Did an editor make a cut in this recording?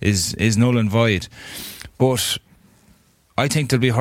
no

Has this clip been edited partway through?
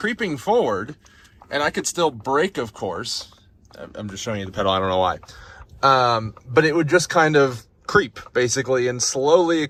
no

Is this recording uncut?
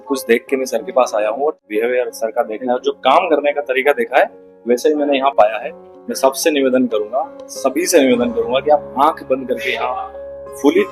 no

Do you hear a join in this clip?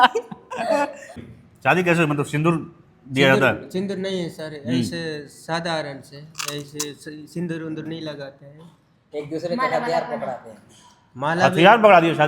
yes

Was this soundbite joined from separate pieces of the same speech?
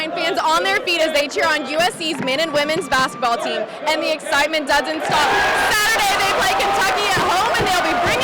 no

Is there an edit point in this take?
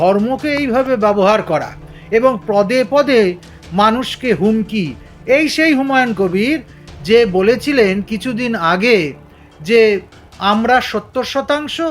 no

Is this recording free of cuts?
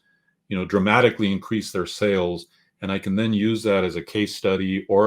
yes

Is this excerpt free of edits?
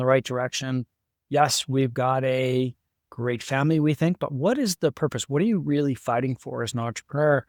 yes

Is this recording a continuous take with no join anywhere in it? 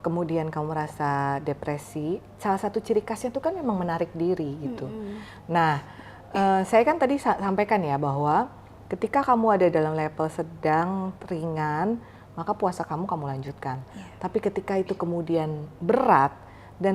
yes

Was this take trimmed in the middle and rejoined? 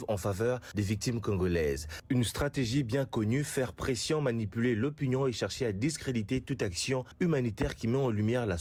no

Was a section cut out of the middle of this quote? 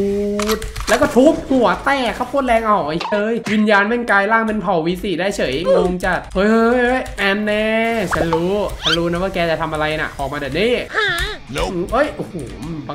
no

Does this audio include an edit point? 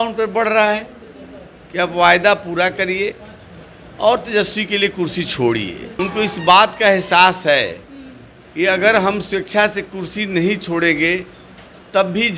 yes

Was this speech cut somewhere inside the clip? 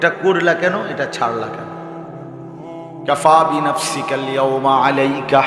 no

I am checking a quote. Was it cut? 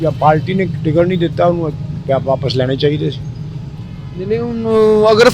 no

